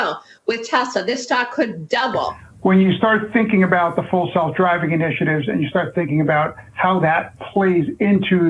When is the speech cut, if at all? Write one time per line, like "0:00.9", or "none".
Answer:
0:02.3

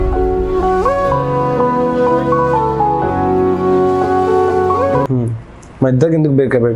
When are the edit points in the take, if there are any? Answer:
0:05.1

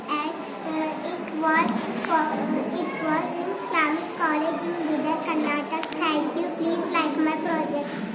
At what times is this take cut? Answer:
none

